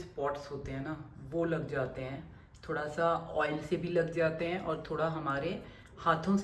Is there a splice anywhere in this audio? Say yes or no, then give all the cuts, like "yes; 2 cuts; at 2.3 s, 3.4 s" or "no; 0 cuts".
no; 0 cuts